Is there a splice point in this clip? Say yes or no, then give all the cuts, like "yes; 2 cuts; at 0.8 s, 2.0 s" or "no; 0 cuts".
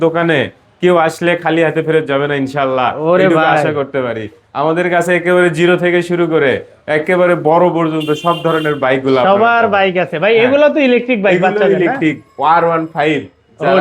no; 0 cuts